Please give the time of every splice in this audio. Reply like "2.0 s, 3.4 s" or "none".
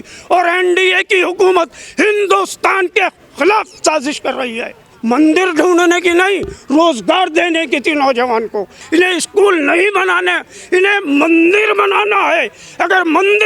4.8 s, 8.8 s